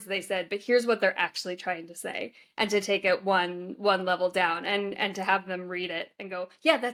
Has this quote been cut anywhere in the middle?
no; 0 cuts

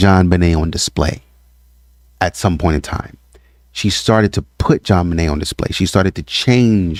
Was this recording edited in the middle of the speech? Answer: no; 0 cuts

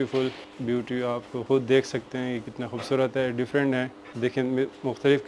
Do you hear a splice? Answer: no; 0 cuts

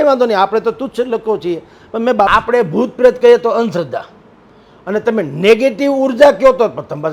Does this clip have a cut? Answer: yes; 1 cut; at 2.3 s

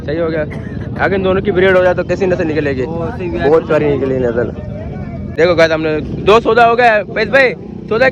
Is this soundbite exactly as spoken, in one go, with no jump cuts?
no; 1 cut; at 5.3 s

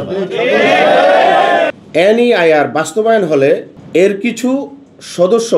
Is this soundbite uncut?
no; 1 cut; at 1.8 s

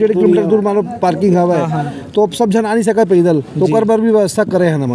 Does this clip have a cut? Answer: no; 0 cuts

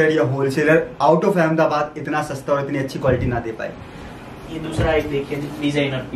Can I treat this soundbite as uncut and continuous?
yes; 0 cuts

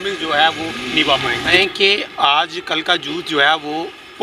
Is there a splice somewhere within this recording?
yes; 1 cut; at 1.6 s

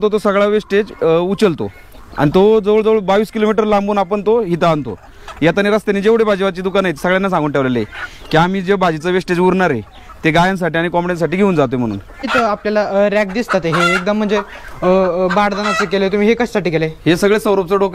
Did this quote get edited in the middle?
yes; 1 cut; at 12.3 s

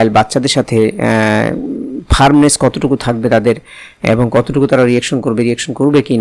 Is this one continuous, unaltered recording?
yes; 0 cuts

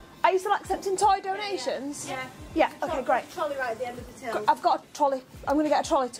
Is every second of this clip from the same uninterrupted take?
yes; 0 cuts

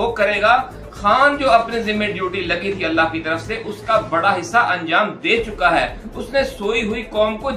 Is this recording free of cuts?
yes; 0 cuts

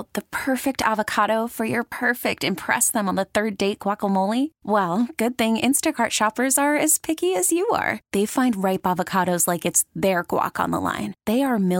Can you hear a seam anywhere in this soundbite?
no; 0 cuts

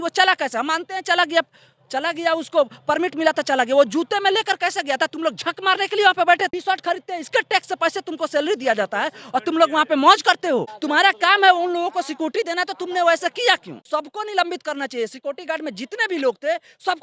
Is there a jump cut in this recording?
yes; 1 cut; at 6.5 s

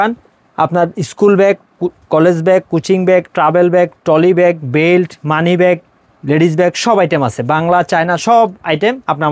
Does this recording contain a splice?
no; 0 cuts

